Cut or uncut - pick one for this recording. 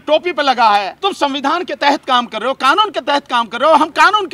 cut